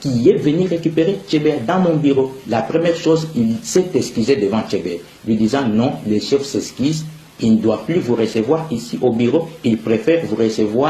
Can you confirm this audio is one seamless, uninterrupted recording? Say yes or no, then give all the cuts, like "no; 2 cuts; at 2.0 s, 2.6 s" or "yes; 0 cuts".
no; 1 cut; at 4.9 s